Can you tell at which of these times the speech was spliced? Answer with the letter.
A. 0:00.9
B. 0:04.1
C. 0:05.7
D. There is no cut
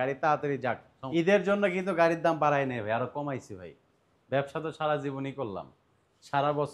A